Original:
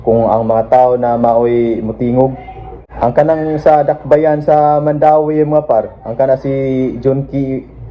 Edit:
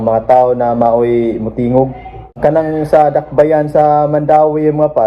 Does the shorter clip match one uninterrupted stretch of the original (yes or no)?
no